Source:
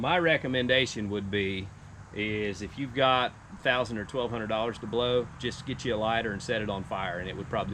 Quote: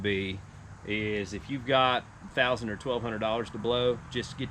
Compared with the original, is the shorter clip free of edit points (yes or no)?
yes